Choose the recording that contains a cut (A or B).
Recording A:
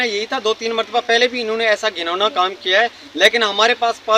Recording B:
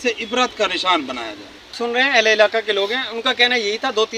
B